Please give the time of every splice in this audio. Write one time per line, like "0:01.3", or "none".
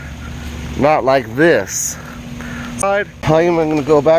0:02.8